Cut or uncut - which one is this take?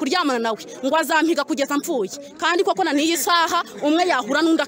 uncut